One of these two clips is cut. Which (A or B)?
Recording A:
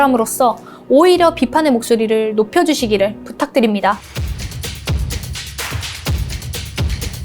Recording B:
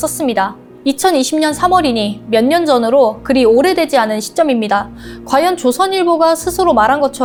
A